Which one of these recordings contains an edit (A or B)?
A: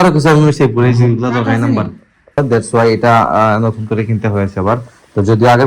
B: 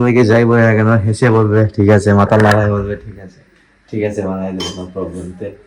A